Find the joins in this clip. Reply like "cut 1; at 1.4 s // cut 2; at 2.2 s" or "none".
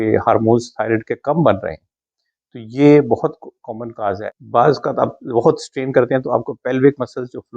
cut 1; at 4.2 s